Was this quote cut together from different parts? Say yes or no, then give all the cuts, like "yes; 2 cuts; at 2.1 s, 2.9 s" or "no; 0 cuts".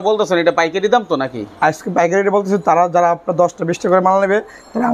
no; 0 cuts